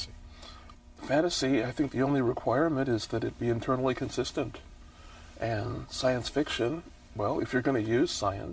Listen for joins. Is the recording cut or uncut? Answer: cut